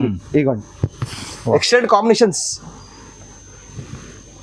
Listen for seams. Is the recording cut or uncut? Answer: uncut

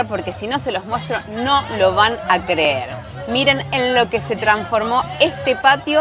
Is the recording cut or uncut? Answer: uncut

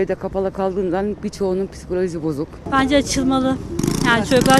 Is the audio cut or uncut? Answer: cut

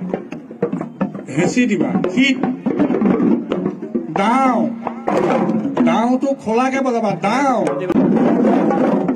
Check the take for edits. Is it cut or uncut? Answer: cut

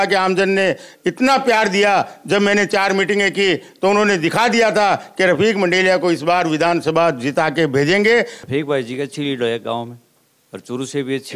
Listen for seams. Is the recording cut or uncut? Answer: cut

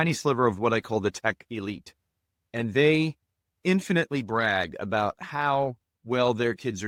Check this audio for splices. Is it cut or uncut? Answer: uncut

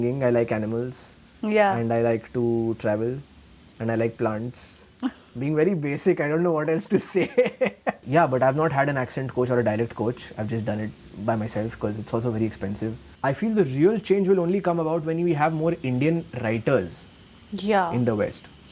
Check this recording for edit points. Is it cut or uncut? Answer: cut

